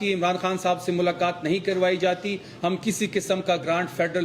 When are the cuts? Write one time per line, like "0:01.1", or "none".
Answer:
none